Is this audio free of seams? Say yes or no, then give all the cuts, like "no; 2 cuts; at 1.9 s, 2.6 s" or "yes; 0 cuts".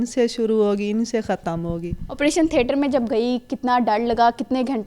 yes; 0 cuts